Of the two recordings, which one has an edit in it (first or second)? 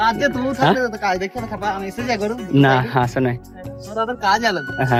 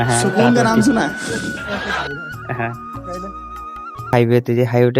second